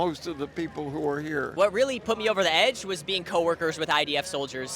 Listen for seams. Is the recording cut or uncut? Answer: cut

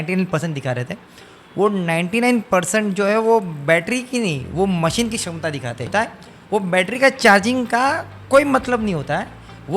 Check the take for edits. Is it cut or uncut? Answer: cut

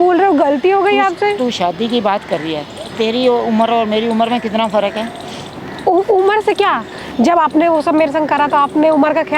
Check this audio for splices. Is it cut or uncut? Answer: uncut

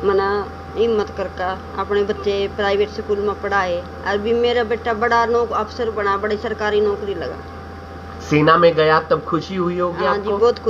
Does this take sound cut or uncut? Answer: uncut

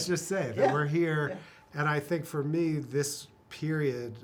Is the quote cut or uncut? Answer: uncut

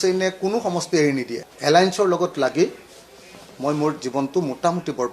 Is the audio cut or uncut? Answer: cut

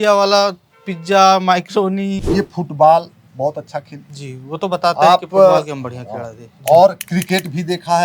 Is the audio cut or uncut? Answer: cut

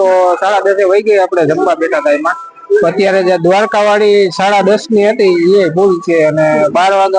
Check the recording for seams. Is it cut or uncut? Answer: uncut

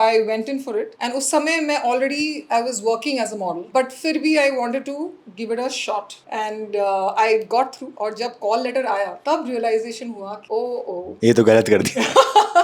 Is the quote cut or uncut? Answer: cut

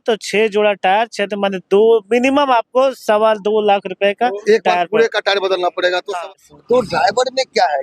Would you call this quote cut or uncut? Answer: cut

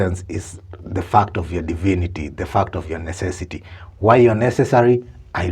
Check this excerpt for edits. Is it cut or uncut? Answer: uncut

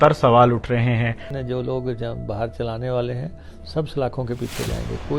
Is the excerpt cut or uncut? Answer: cut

